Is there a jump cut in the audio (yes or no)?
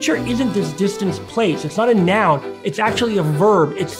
yes